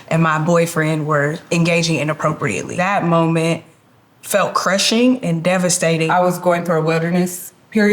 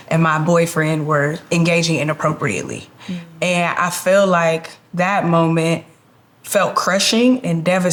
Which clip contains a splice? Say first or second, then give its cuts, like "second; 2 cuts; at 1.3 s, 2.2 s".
first; 2 cuts; at 2.7 s, 6.1 s